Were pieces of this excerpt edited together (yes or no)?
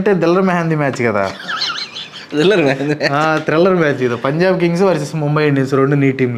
no